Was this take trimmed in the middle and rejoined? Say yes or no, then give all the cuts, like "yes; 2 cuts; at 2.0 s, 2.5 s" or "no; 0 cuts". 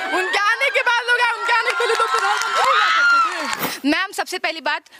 yes; 1 cut; at 3.6 s